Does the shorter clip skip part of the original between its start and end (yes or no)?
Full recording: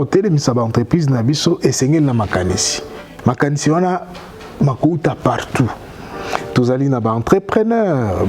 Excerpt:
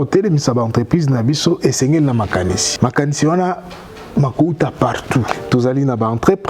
yes